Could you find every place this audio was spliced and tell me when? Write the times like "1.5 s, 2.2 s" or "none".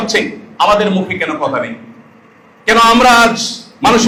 none